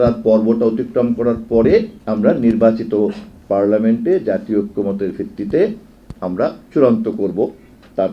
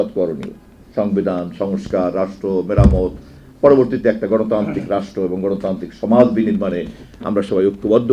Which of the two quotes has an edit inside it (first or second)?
first